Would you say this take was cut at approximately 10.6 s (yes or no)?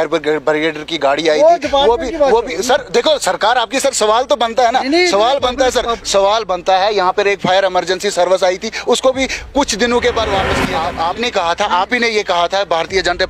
yes